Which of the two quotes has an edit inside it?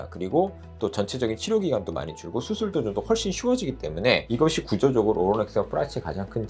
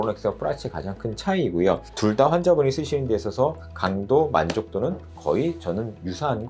first; 1 cut; at 4.2 s

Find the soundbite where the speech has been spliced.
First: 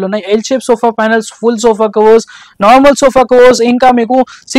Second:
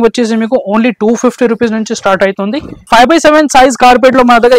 second; 1 cut; at 2.8 s

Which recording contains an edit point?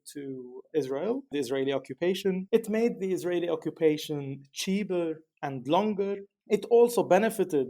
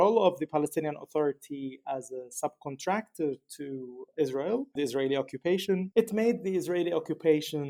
first; 1 cut; at 6.3 s

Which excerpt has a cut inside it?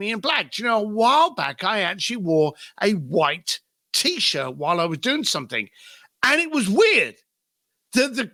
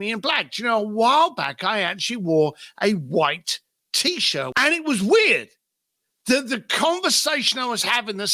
second; 1 cut; at 4.5 s

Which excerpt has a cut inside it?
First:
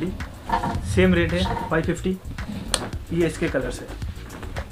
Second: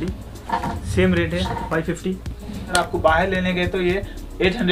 second; 1 cut; at 2.7 s

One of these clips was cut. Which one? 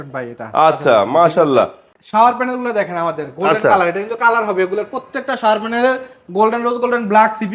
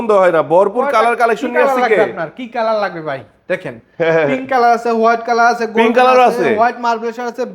first; 1 cut; at 1.9 s

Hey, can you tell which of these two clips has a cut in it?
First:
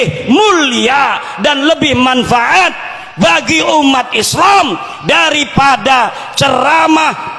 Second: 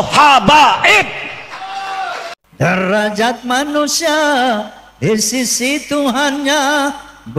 second; 1 cut; at 2.7 s

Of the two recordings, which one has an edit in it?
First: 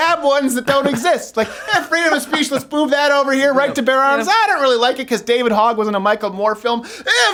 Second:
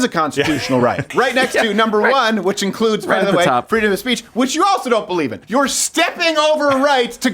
second; 2 cuts; at 1.0 s, 5.4 s

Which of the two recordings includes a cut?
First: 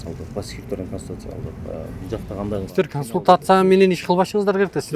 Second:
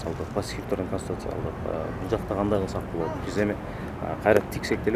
first; 1 cut; at 2.7 s

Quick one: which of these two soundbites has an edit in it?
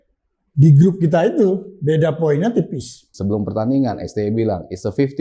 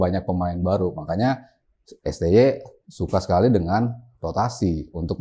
first; 1 cut; at 3.1 s

